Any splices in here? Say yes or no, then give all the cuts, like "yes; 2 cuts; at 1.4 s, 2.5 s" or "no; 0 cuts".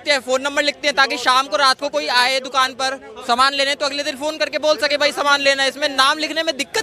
no; 0 cuts